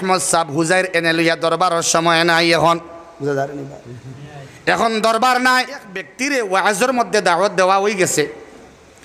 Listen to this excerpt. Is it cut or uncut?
cut